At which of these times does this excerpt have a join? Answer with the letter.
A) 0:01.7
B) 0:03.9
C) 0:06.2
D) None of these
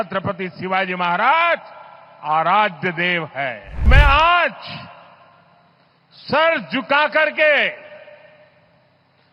B